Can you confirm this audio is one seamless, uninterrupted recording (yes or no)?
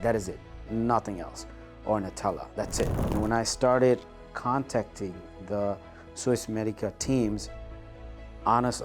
no